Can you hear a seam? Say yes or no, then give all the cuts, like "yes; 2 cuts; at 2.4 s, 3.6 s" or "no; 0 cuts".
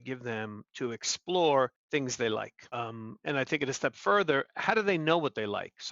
yes; 2 cuts; at 1.8 s, 2.6 s